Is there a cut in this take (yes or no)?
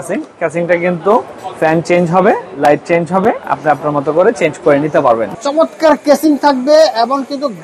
yes